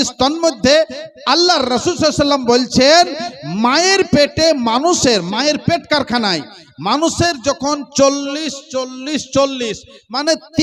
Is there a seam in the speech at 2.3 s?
no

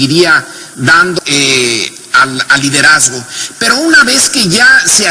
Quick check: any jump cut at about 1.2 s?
no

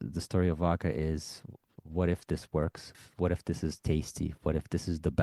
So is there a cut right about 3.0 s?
yes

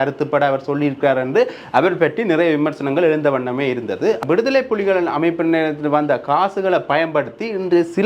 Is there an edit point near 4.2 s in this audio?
yes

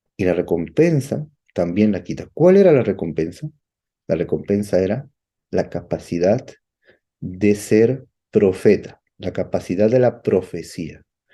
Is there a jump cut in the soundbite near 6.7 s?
no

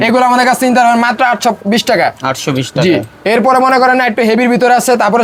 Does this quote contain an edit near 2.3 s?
no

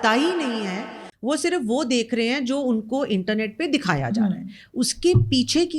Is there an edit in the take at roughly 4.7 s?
no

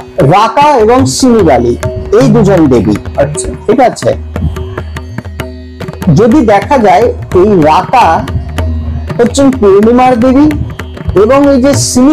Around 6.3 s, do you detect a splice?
no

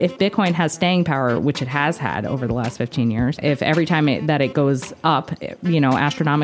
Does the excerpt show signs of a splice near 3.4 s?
yes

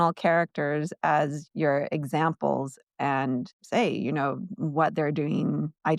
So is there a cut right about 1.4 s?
yes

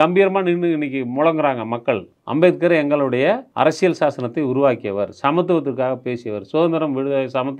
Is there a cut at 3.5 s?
yes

